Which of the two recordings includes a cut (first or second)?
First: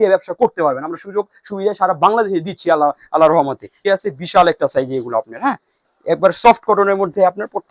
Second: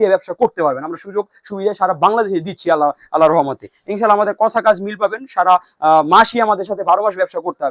first